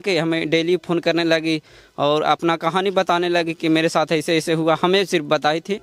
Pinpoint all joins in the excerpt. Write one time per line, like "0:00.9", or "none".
none